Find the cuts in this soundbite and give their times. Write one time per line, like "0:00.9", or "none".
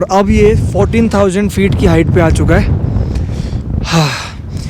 none